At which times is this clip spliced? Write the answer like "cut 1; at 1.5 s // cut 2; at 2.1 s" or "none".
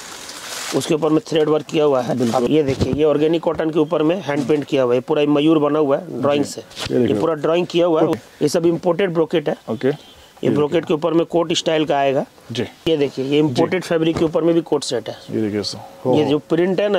cut 1; at 2.5 s // cut 2; at 8.2 s // cut 3; at 12.8 s